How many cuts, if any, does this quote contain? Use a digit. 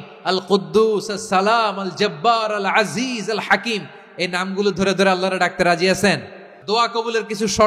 1